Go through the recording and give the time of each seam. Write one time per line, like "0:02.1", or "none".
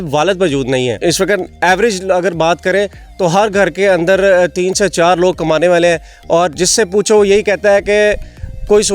none

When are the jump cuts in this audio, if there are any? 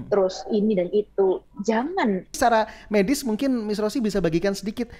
0:02.4

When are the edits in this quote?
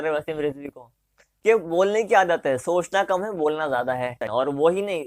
0:01.2
0:04.2

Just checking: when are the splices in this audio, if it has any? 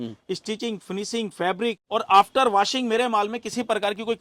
0:01.8

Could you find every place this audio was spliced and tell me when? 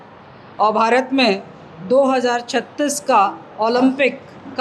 none

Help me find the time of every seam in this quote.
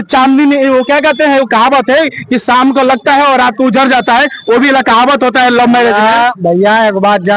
none

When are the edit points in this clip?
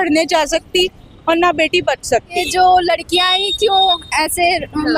0:02.4

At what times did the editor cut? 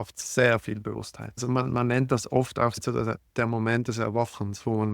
0:01.4
0:02.8

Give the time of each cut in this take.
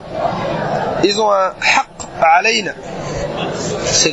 none

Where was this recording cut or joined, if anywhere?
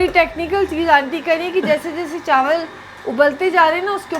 none

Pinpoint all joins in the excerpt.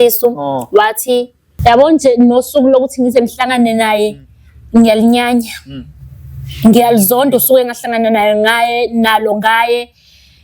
0:01.4

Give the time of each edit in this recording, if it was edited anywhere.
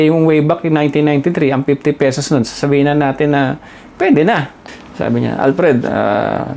0:04.5

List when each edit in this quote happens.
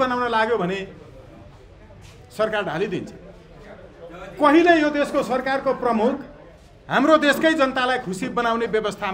none

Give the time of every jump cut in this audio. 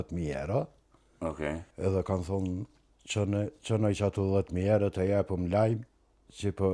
0:01.7

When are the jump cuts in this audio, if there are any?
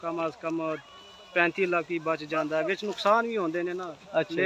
none

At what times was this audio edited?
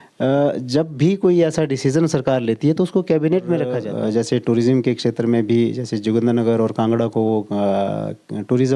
0:03.8

